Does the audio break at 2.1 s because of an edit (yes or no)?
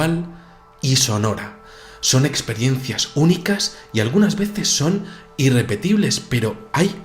no